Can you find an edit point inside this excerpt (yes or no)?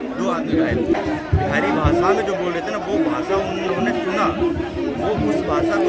yes